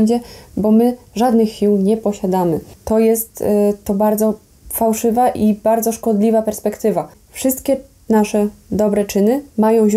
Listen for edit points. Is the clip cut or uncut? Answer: cut